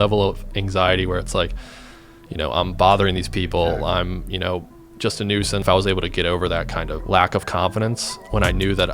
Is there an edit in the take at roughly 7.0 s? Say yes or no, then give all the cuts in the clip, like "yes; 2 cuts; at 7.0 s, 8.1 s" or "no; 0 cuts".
yes; 2 cuts; at 5.6 s, 7.0 s